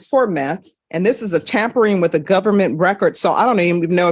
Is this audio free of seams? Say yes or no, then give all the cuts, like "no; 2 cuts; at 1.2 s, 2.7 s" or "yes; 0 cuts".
yes; 0 cuts